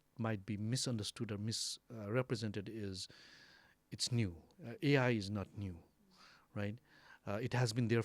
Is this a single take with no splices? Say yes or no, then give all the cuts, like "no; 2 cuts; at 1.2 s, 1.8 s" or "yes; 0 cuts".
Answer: yes; 0 cuts